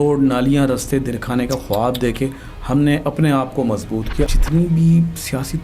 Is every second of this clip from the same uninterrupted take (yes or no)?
no